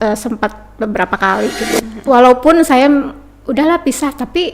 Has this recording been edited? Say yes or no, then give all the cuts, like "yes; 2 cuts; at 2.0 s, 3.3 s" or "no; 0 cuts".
yes; 1 cut; at 1.8 s